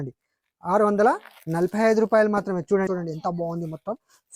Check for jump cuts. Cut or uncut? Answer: cut